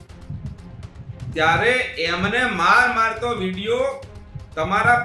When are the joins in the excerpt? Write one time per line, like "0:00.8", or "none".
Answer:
none